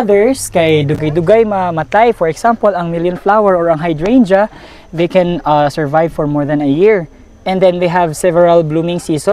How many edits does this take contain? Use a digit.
0